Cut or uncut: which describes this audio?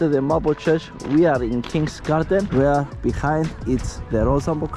cut